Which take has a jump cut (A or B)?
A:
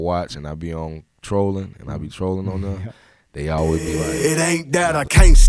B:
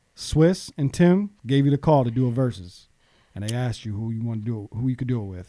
A